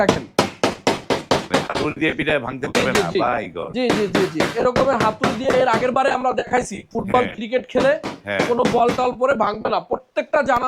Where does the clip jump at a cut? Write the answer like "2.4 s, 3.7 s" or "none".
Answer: none